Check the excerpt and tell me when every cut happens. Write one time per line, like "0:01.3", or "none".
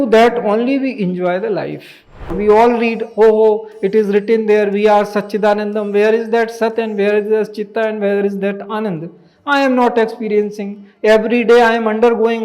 0:02.3

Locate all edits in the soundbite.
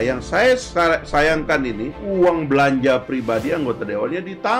0:02.0

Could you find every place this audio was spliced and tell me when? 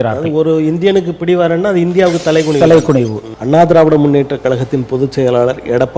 0:03.2

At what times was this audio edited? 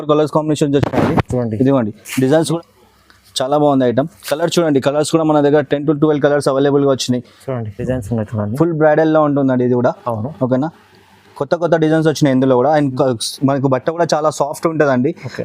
0:02.5
0:07.8

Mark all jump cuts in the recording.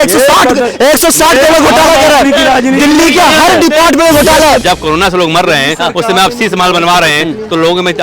0:04.6

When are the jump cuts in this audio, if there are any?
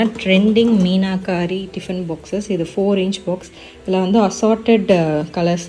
none

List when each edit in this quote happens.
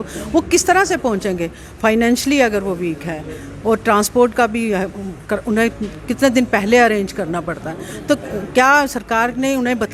none

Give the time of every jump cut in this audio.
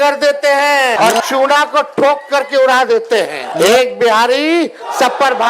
0:01.0
0:03.4

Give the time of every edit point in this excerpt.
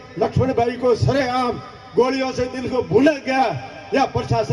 none

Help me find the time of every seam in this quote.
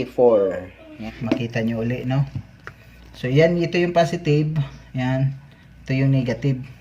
0:00.9

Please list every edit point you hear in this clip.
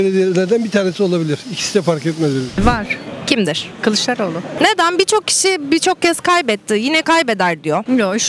0:02.5

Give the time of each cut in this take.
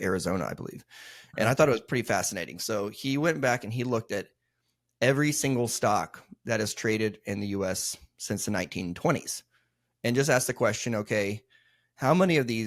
none

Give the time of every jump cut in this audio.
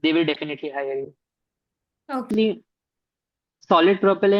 0:02.3

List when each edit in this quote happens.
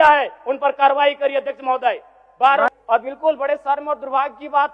0:02.7

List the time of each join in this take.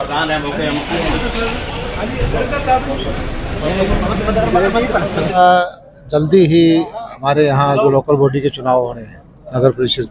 0:05.4

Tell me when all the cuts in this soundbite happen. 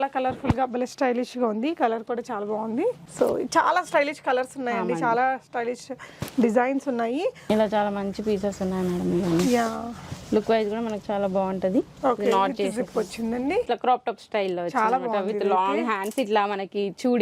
0:03.0
0:07.4
0:13.7

